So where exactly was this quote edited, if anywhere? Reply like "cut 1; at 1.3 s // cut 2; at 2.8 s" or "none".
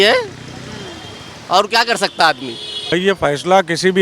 cut 1; at 2.9 s